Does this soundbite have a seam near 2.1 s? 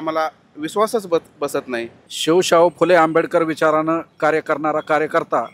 yes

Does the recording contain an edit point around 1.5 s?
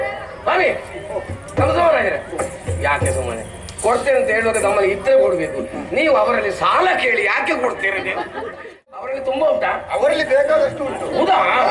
no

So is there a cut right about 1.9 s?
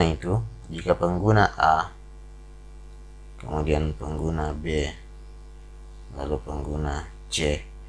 no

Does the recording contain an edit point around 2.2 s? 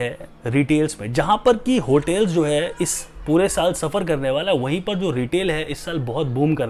no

